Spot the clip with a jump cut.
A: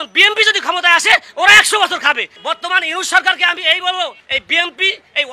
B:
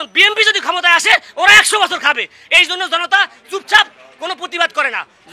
A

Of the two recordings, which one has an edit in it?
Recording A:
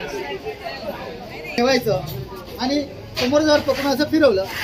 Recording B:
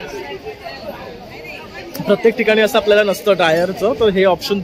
A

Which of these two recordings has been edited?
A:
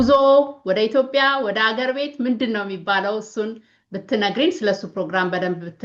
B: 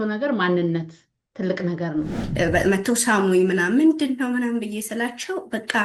B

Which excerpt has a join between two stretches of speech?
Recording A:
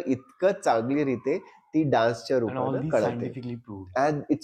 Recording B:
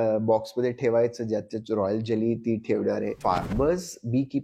B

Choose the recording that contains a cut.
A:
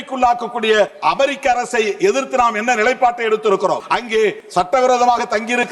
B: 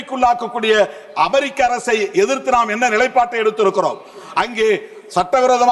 A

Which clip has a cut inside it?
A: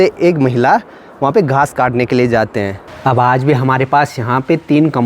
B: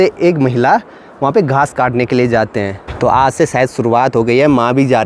A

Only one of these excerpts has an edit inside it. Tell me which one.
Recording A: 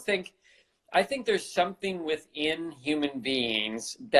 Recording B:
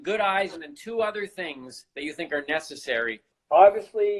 B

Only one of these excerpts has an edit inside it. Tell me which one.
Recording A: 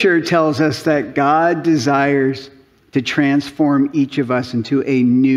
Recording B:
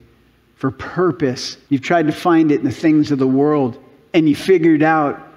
B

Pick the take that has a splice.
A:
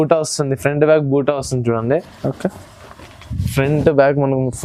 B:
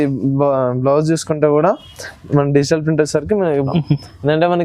B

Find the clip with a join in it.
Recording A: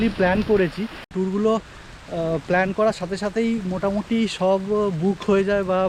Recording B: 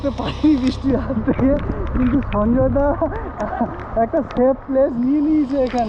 A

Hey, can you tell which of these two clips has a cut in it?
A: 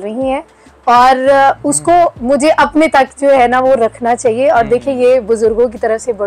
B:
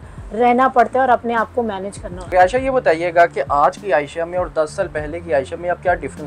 B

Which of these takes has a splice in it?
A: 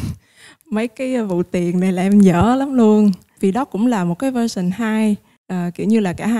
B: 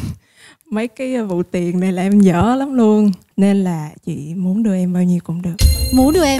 B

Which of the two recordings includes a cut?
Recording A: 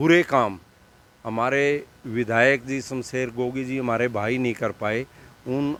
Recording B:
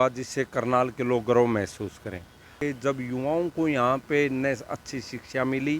B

